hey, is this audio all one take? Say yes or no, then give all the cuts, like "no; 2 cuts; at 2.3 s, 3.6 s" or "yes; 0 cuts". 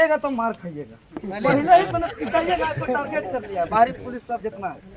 yes; 0 cuts